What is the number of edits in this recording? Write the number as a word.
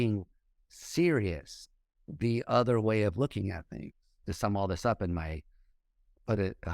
one